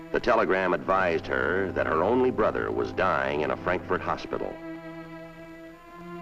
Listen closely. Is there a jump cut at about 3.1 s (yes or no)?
yes